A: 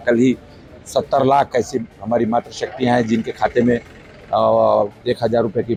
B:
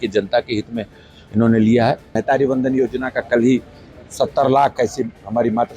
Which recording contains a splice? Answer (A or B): B